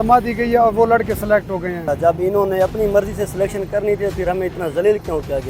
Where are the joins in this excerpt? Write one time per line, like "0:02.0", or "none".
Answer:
0:01.9